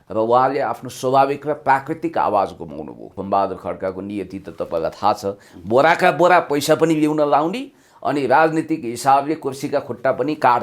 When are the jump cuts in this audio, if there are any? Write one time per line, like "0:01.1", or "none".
0:03.1